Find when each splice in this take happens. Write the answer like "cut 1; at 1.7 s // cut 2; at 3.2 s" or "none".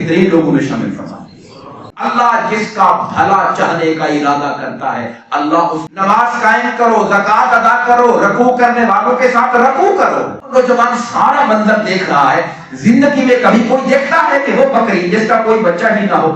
cut 1; at 1.9 s // cut 2; at 5.9 s // cut 3; at 10.4 s